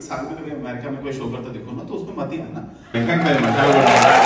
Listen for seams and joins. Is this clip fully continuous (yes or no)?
yes